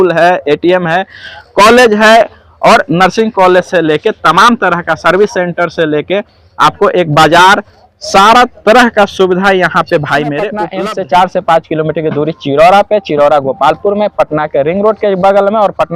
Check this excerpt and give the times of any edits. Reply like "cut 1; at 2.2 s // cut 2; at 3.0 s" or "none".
cut 1; at 10.6 s